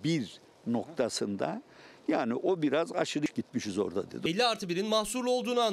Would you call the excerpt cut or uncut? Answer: cut